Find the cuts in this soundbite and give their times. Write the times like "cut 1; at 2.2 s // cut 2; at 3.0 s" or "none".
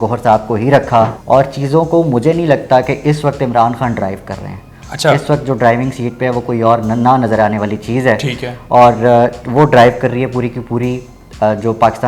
cut 1; at 1.2 s

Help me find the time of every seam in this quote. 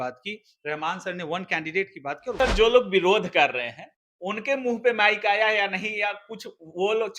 cut 1; at 2.4 s

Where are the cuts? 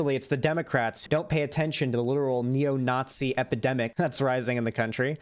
cut 1; at 1.0 s // cut 2; at 3.9 s

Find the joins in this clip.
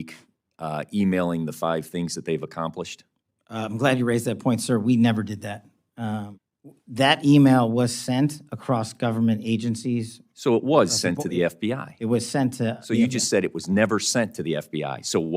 cut 1; at 6.3 s

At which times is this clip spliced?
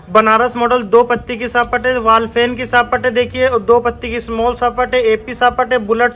none

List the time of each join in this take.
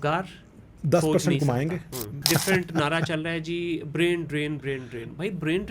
cut 1; at 2.2 s

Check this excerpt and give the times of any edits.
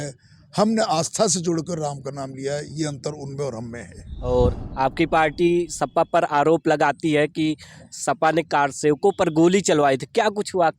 cut 1; at 4.2 s

